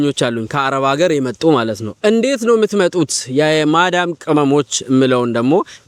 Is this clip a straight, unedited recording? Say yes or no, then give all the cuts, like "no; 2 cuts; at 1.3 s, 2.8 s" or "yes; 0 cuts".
yes; 0 cuts